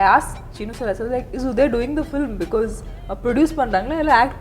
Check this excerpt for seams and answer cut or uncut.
cut